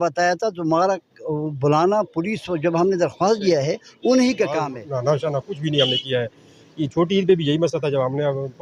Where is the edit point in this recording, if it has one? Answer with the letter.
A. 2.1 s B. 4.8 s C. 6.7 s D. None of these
B